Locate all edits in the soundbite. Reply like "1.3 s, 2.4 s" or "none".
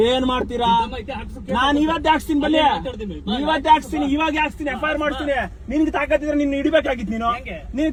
none